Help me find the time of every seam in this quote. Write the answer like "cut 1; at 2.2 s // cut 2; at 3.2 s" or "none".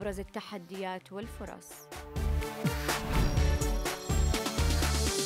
cut 1; at 1.7 s